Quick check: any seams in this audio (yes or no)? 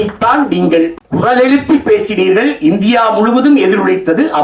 yes